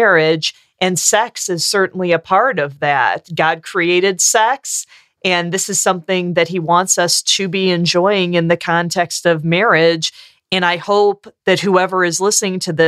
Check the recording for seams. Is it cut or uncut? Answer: uncut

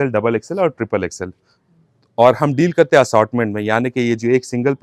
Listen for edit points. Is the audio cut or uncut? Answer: uncut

